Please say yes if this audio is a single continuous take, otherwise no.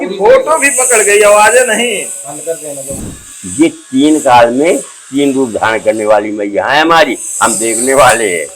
no